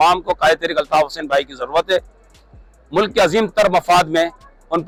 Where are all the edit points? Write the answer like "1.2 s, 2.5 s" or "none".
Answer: none